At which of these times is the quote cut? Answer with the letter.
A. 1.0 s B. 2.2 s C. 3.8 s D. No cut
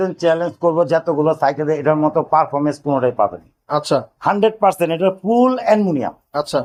D